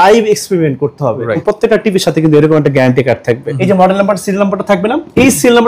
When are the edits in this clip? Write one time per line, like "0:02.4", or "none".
0:01.4
0:03.5